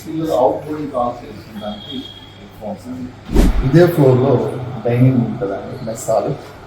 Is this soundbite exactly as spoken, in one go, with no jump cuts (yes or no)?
no